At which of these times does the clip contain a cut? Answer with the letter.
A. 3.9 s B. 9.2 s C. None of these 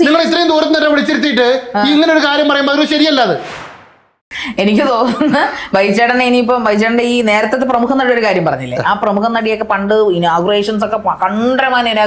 A